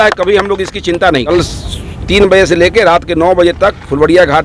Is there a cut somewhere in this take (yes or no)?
yes